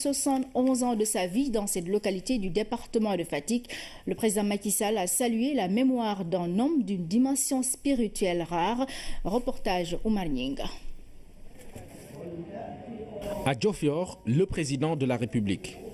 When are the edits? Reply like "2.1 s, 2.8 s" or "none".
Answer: none